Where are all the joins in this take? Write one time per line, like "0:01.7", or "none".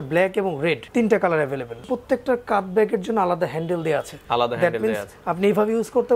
0:00.8
0:01.9
0:04.1